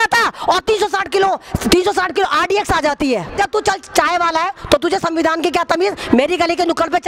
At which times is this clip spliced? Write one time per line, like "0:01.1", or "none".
0:03.3